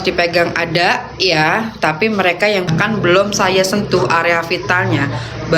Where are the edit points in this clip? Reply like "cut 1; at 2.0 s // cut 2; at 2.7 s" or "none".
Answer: cut 1; at 2.7 s